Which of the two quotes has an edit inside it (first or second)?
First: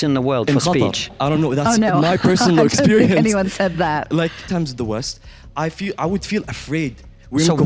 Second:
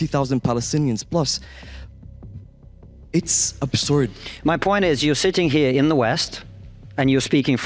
first